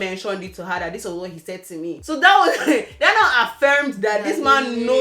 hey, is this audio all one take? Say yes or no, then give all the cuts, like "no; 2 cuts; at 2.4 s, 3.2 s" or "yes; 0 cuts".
no; 1 cut; at 2.0 s